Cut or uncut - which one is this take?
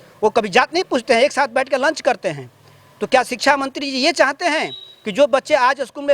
uncut